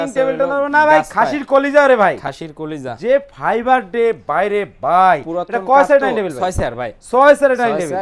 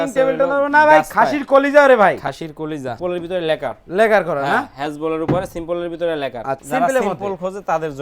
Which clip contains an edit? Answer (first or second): second